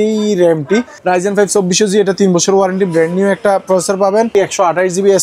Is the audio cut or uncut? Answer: cut